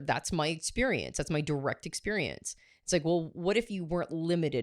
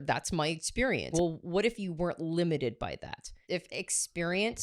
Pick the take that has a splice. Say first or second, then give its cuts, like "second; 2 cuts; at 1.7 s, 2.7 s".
second; 2 cuts; at 1.1 s, 3.4 s